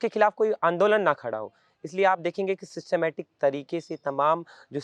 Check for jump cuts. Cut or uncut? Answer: uncut